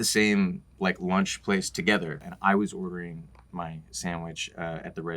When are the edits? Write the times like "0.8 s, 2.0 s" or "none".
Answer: 2.3 s